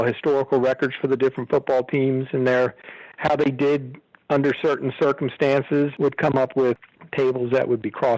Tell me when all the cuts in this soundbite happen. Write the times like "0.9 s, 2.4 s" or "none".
5.9 s, 6.8 s